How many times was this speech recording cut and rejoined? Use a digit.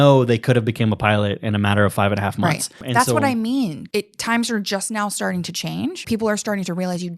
3